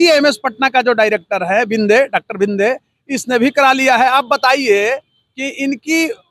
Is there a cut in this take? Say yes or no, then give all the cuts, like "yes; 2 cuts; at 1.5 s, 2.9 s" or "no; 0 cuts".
no; 0 cuts